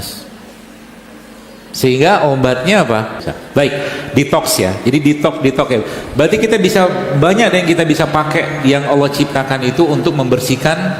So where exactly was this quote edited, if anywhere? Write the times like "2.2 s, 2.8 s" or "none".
3.3 s